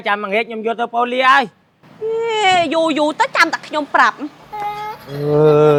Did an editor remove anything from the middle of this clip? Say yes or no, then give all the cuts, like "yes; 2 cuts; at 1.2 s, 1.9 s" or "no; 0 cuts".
no; 0 cuts